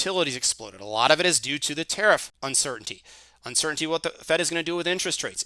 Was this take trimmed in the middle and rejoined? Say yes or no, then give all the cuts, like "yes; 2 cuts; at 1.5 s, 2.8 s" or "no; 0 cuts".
yes; 1 cut; at 2.3 s